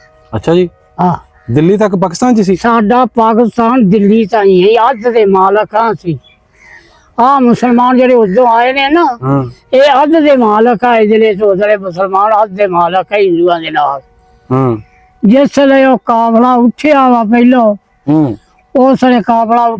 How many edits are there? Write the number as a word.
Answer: one